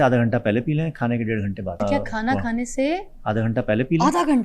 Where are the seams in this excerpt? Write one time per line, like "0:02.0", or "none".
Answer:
0:01.8